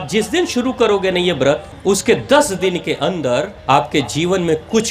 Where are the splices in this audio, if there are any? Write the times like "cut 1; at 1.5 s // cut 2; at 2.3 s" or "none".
cut 1; at 1.7 s // cut 2; at 3.5 s